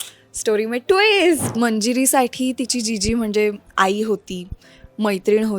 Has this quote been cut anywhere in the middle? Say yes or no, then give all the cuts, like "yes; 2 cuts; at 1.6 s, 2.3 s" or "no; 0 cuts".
yes; 1 cut; at 1.4 s